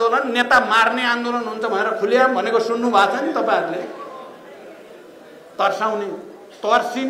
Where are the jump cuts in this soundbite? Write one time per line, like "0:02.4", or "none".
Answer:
none